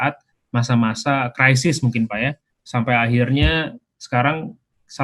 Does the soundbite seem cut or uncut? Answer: cut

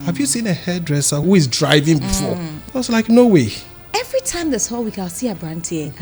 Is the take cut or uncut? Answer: cut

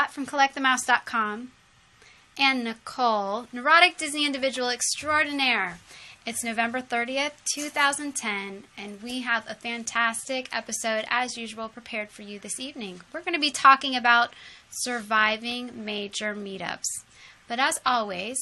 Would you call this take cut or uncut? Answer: uncut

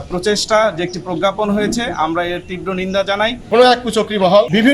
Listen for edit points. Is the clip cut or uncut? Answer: cut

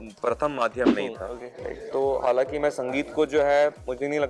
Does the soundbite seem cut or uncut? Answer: cut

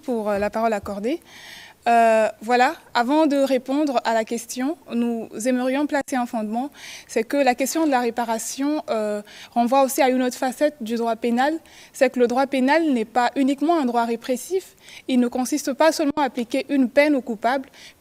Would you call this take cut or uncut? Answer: uncut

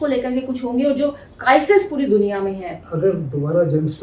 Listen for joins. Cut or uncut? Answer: cut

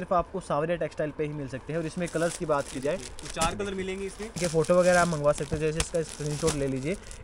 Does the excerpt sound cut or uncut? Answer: cut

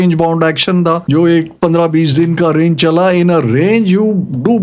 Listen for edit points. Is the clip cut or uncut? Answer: cut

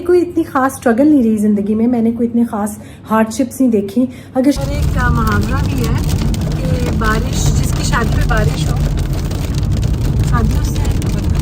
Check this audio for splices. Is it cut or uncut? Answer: cut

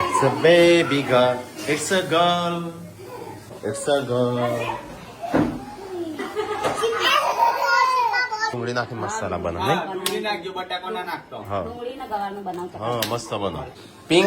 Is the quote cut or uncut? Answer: cut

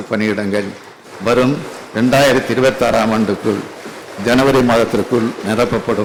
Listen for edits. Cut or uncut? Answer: uncut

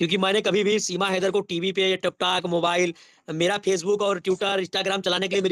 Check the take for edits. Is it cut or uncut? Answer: uncut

